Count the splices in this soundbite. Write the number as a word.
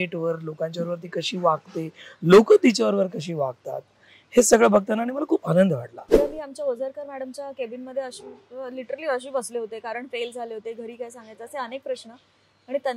one